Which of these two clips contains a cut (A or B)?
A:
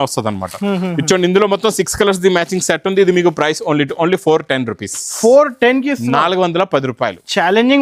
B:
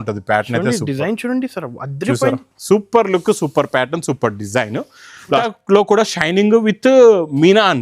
B